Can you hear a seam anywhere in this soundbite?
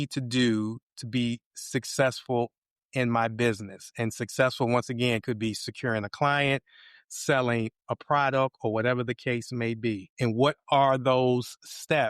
yes; 1 cut; at 10.1 s

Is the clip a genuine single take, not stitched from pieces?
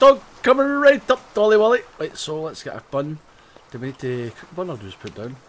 yes; 0 cuts

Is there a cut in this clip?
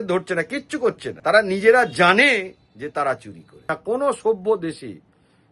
yes; 2 cuts; at 1.1 s, 3.6 s

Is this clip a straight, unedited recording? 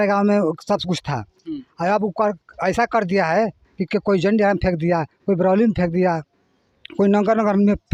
yes; 0 cuts

